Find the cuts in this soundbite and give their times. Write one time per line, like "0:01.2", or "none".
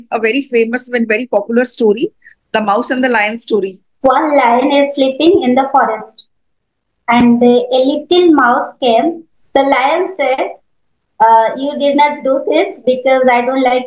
0:03.8
0:09.3